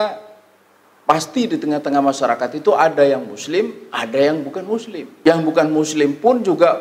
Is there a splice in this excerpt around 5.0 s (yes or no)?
yes